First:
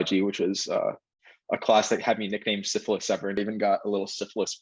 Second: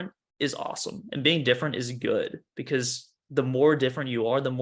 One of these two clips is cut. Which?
first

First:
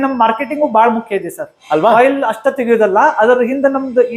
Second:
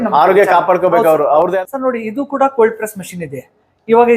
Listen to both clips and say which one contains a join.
second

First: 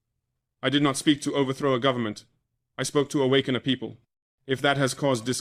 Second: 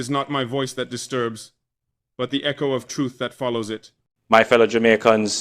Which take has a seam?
second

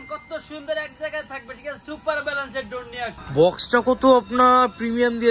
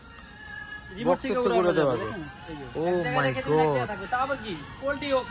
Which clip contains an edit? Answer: first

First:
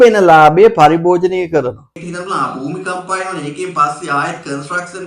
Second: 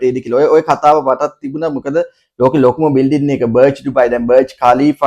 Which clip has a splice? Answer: first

